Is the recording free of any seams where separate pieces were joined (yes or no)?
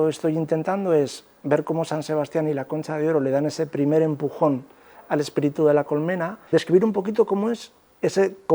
no